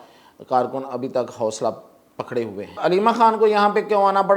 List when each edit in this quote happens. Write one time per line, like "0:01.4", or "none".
0:02.8